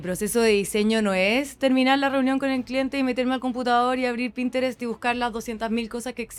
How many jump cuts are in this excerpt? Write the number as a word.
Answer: zero